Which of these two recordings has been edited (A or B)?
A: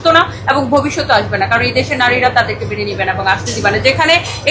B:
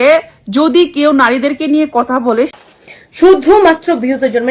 B